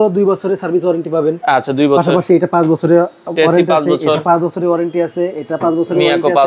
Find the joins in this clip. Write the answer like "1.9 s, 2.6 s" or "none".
none